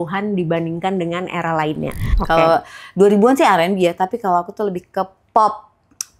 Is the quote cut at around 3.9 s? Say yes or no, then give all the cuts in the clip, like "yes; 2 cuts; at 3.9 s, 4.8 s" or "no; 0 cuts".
no; 1 cut; at 2.1 s